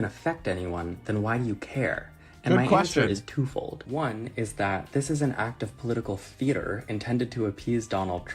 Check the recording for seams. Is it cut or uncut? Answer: uncut